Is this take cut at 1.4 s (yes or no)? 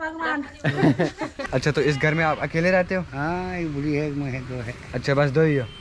yes